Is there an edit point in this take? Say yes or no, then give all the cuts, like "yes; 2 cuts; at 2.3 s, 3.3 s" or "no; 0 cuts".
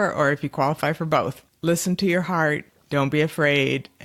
yes; 2 cuts; at 1.4 s, 2.7 s